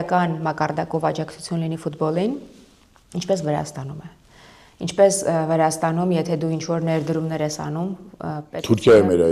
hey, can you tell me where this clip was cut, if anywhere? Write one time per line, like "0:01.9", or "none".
none

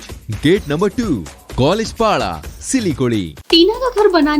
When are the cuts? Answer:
0:03.4

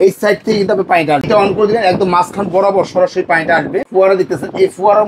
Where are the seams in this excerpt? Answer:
0:01.2
0:03.9

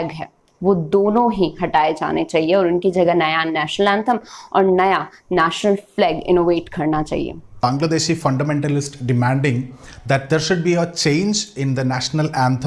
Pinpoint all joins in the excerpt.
0:07.6

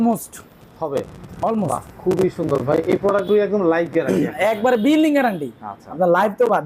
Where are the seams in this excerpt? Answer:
none

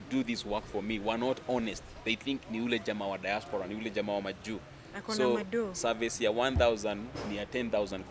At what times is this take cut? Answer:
none

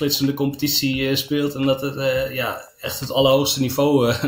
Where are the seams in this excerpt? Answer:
none

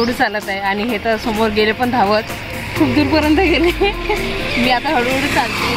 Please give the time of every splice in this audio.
none

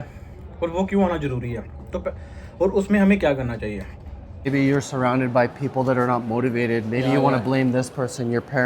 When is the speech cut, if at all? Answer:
0:04.5

